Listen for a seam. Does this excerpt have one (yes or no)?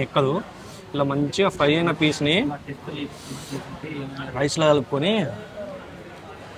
no